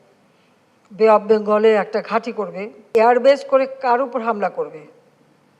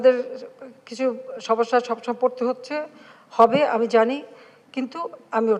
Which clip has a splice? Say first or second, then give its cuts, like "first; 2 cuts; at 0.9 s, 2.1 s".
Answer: first; 1 cut; at 2.9 s